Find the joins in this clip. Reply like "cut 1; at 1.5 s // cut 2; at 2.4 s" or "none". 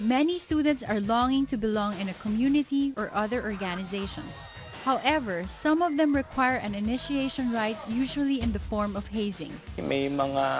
none

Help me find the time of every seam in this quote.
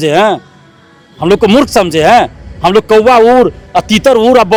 none

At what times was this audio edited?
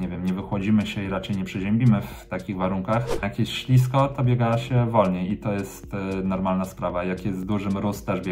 cut 1; at 3.3 s

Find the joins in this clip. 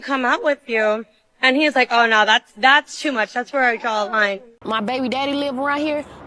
cut 1; at 4.5 s

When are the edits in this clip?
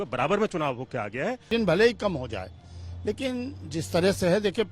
cut 1; at 1.5 s

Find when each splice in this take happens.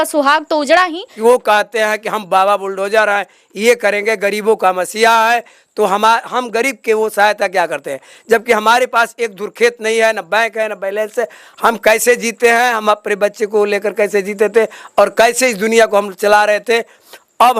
cut 1; at 1.0 s

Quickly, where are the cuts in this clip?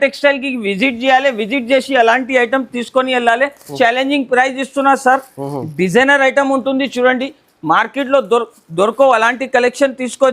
cut 1; at 3.7 s

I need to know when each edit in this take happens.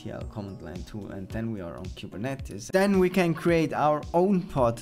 cut 1; at 2.5 s

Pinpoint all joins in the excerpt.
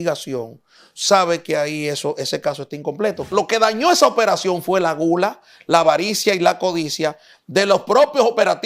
cut 1; at 3.2 s

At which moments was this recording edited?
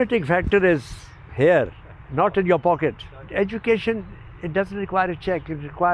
cut 1; at 3.2 s

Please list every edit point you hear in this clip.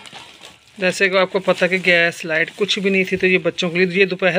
none

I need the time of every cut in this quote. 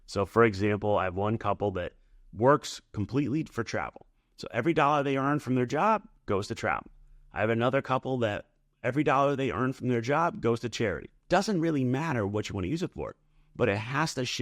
cut 1; at 11.1 s

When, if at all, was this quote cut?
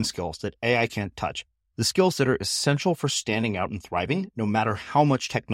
none

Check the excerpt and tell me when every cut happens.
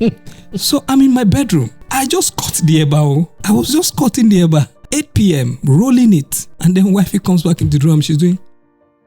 cut 1; at 1.8 s // cut 2; at 3.3 s // cut 3; at 4.8 s // cut 4; at 6.4 s

